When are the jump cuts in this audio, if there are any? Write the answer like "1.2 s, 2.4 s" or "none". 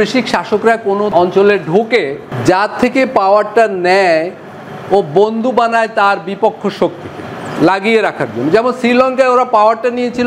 1.1 s, 2.2 s